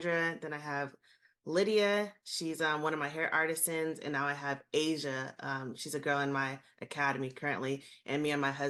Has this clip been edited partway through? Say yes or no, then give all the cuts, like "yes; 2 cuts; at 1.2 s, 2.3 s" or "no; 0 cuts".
no; 0 cuts